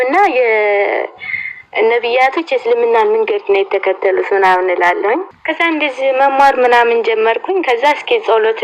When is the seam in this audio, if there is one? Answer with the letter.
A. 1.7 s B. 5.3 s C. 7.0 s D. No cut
B